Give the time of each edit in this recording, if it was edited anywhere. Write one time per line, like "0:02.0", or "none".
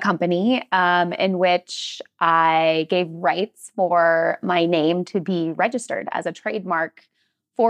none